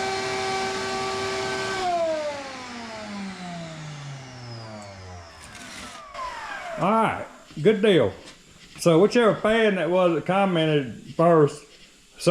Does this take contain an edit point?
no; 0 cuts

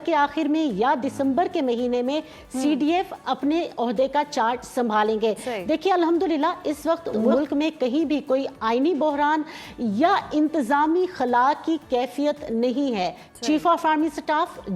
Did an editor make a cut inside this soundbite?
no; 0 cuts

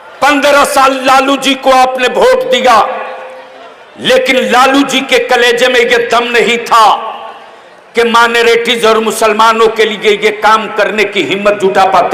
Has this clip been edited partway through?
no; 0 cuts

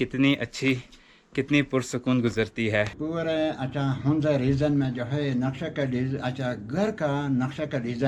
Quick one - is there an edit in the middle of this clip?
yes; 1 cut; at 3.0 s

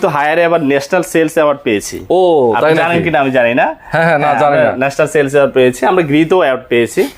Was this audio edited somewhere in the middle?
no; 0 cuts

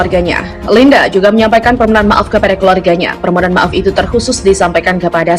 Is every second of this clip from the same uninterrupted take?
yes; 0 cuts

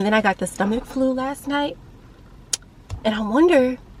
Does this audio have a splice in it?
no; 0 cuts

